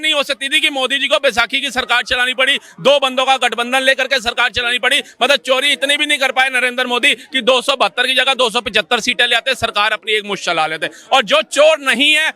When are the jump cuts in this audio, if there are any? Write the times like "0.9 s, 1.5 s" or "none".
none